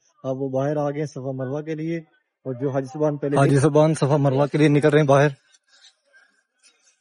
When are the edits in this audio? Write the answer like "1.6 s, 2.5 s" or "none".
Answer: 3.3 s